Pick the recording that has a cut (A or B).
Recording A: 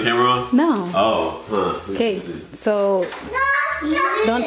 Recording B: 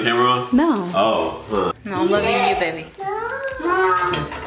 B